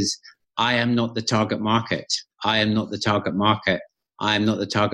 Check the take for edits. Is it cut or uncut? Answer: uncut